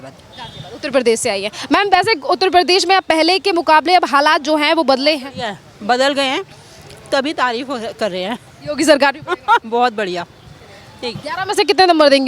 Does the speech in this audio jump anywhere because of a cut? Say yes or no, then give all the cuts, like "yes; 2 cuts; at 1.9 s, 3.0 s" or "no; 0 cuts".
yes; 1 cut; at 11.2 s